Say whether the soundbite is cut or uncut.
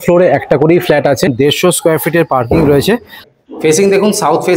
cut